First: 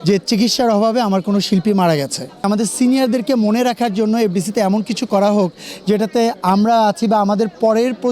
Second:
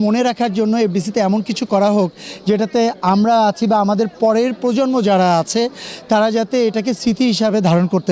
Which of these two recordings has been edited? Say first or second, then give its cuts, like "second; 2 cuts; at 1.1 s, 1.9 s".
first; 1 cut; at 2.5 s